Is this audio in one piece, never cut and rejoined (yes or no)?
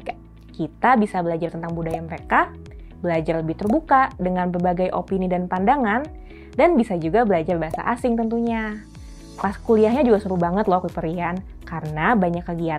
yes